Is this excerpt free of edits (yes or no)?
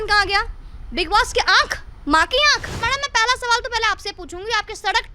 no